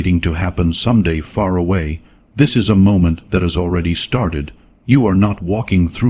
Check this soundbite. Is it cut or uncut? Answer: uncut